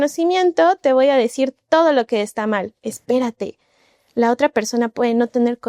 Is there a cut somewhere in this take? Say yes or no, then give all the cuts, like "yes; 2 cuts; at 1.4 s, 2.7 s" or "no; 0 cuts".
no; 0 cuts